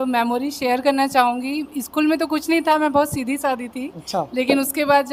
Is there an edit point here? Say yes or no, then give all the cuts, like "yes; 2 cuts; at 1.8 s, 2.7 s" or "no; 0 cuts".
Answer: no; 0 cuts